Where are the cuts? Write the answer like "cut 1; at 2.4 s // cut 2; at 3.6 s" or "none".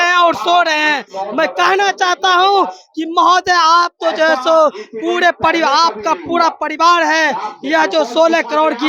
none

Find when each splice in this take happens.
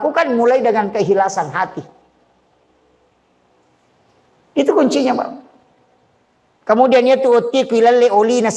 none

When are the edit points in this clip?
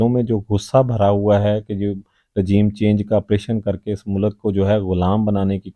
none

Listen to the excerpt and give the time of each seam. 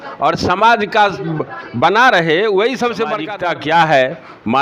cut 1; at 3.2 s

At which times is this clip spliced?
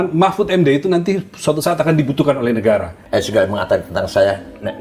cut 1; at 3.0 s

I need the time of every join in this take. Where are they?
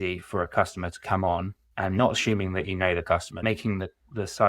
cut 1; at 1.6 s // cut 2; at 3.4 s

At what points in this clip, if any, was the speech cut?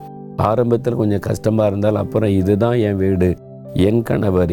none

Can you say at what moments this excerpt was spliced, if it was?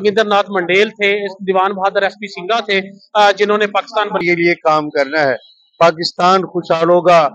cut 1; at 4.2 s

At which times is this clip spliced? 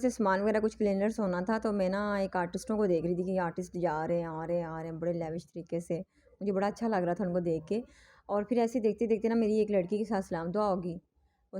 none

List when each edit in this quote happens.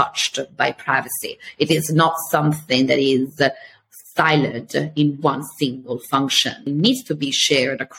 cut 1; at 6.6 s

